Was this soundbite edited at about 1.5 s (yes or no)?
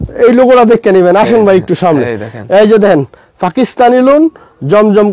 no